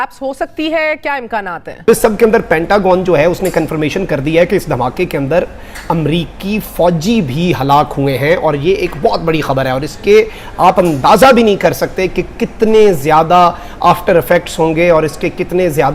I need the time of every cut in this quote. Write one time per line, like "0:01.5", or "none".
0:01.9